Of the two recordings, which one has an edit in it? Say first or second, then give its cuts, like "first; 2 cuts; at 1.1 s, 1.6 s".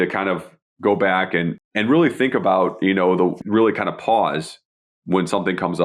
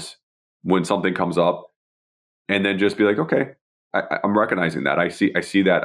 first; 2 cuts; at 1.6 s, 3.4 s